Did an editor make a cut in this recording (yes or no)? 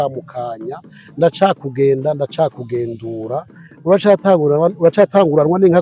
no